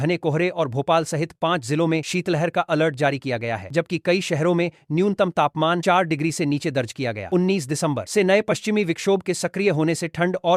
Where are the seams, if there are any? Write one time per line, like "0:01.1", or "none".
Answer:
none